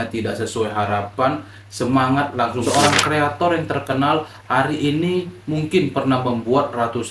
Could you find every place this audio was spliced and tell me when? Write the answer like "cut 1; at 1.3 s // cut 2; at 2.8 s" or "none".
cut 1; at 2.6 s